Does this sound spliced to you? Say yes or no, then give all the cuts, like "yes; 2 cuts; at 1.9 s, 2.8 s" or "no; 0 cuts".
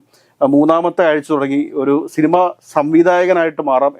no; 0 cuts